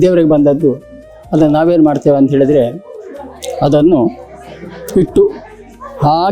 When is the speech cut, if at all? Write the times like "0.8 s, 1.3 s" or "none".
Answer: none